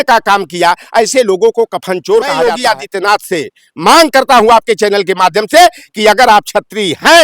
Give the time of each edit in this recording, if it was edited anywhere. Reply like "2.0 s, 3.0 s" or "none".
2.6 s